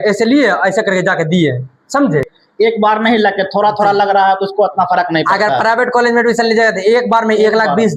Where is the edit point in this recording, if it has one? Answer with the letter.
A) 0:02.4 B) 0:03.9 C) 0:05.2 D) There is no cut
A